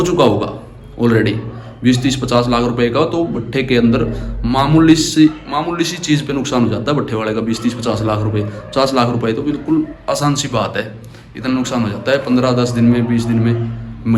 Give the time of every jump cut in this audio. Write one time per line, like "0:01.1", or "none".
none

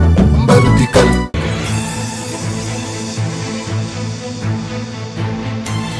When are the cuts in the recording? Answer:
none

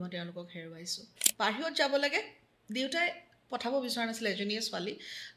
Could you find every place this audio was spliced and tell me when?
0:01.3

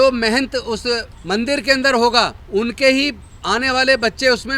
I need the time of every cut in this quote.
0:01.1
0:02.4

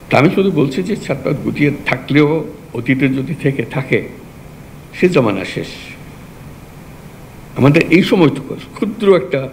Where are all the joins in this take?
none

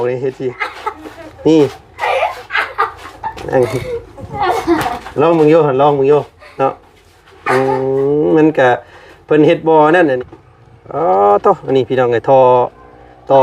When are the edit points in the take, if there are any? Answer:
0:10.2

